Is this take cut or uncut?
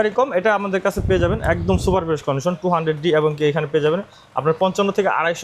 uncut